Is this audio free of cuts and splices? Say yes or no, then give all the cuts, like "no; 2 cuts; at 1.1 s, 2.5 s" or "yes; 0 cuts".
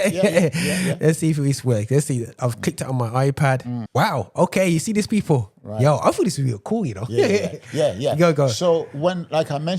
no; 1 cut; at 3.8 s